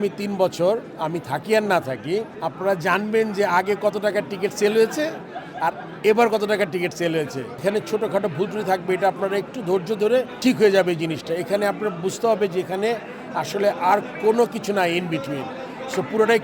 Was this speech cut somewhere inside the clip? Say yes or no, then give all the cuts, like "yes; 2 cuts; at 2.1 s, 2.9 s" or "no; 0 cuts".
yes; 2 cuts; at 7.6 s, 10.3 s